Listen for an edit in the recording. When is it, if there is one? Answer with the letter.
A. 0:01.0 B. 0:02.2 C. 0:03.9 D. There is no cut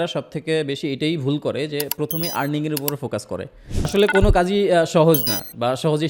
C